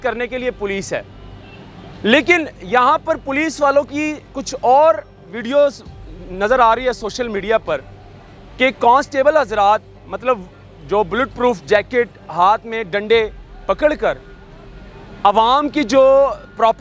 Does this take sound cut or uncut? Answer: uncut